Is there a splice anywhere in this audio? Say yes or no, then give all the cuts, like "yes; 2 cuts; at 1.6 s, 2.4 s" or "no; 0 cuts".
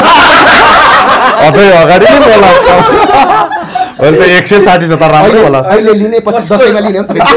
no; 0 cuts